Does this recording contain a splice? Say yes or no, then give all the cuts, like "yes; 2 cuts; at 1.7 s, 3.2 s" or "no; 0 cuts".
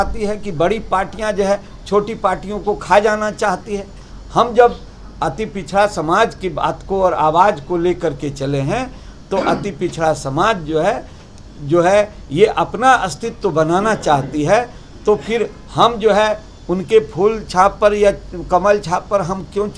no; 0 cuts